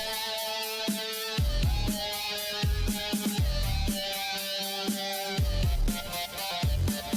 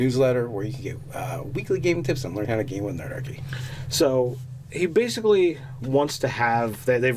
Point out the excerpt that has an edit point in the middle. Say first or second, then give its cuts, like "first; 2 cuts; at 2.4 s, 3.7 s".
second; 1 cut; at 4.0 s